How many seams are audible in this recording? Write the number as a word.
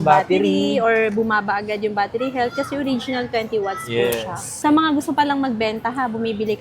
one